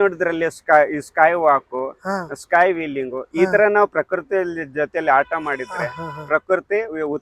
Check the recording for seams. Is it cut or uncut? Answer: uncut